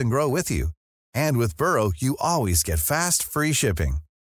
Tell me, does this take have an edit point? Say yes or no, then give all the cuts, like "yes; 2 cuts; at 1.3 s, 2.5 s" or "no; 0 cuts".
no; 0 cuts